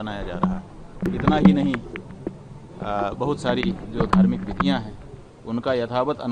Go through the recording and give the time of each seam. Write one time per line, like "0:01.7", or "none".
0:01.1

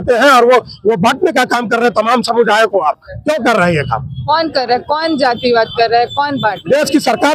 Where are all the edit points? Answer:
none

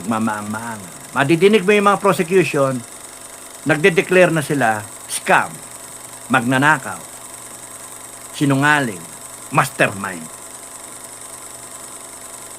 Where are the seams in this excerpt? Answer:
none

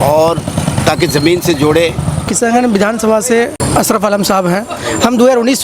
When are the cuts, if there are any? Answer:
0:02.3
0:03.6

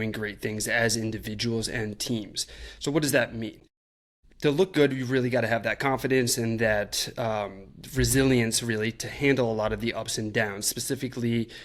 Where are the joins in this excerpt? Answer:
none

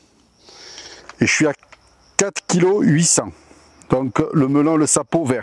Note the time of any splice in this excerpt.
none

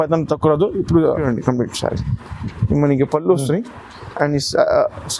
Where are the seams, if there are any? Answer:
0:01.2

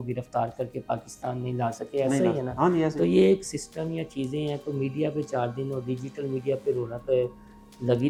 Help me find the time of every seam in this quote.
none

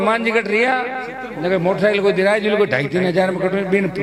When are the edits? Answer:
none

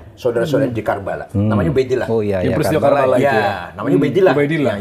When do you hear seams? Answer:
none

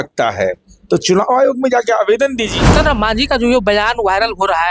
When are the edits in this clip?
0:02.7

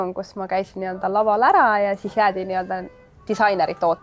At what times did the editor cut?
none

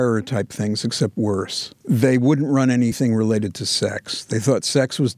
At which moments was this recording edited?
0:03.0

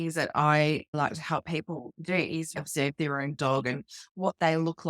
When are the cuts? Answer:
0:00.9
0:02.6

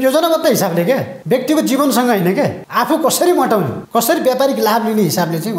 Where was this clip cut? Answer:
0:01.1
0:02.6
0:03.8

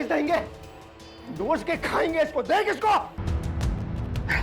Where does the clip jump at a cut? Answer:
0:03.2

